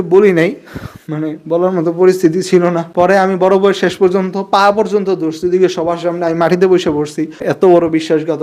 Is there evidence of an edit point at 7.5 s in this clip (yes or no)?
yes